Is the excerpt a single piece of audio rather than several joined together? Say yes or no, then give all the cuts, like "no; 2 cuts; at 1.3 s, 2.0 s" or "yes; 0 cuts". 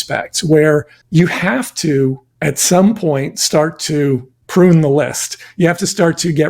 no; 3 cuts; at 1.0 s, 2.3 s, 4.3 s